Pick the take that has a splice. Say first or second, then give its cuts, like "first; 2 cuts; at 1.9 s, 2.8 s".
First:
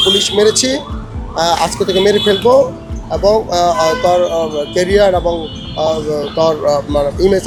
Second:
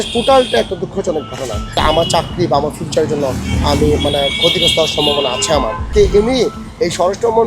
second; 2 cuts; at 1.6 s, 5.8 s